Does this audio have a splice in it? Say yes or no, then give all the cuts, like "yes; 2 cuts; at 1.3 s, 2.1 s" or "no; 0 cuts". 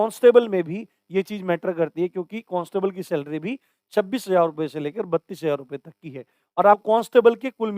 yes; 1 cut; at 6.8 s